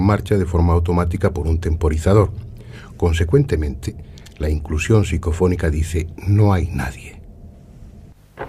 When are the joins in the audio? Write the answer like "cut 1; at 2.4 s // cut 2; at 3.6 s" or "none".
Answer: none